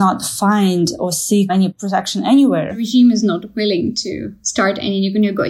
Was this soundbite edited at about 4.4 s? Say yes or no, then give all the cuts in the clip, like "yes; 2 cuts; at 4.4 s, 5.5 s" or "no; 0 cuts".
no; 2 cuts; at 1.7 s, 2.9 s